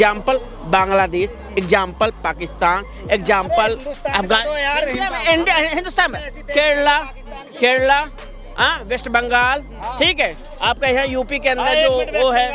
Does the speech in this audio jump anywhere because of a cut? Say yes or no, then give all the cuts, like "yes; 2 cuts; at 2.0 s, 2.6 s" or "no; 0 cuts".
no; 0 cuts